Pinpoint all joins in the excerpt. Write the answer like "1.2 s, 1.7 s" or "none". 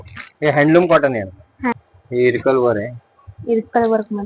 1.7 s